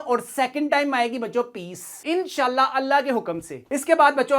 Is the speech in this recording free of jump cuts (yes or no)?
yes